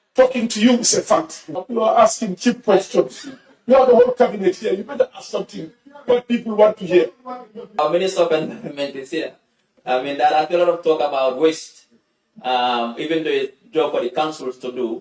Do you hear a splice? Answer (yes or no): yes